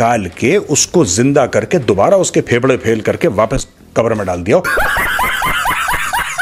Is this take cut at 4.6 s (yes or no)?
yes